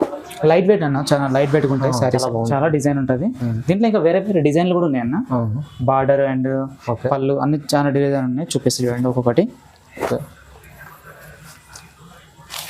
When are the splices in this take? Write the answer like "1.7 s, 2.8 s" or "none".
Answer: 2.2 s